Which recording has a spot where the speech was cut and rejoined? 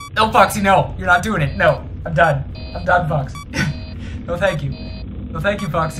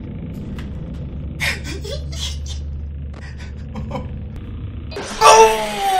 second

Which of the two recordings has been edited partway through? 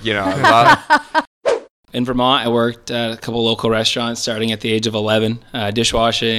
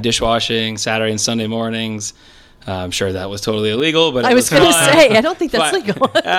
first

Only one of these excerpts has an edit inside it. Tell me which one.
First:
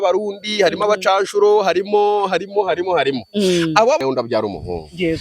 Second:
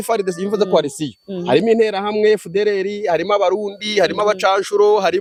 first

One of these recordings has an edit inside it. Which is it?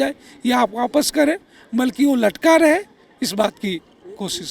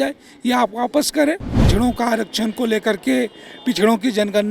second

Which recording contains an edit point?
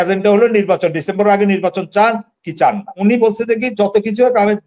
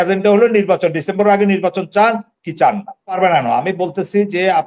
first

